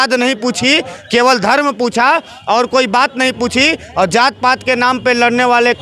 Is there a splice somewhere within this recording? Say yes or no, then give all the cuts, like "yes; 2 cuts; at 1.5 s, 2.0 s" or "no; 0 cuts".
no; 0 cuts